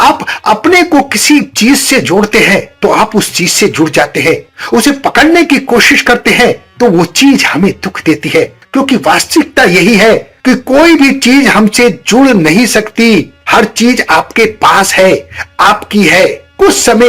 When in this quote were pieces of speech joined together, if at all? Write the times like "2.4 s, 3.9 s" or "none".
8.6 s